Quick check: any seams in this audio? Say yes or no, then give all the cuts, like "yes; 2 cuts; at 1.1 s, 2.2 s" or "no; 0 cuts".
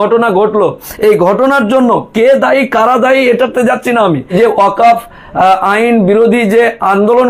yes; 1 cut; at 4.3 s